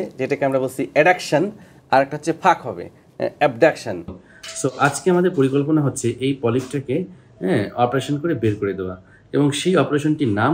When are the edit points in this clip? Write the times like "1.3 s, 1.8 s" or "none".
4.2 s